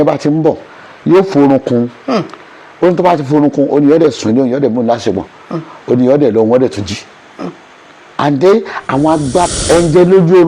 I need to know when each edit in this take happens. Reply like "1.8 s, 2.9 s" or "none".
9.5 s